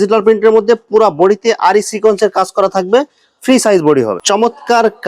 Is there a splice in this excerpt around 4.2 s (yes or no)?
yes